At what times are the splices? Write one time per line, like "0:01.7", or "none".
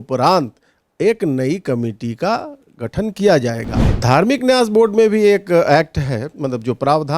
0:03.9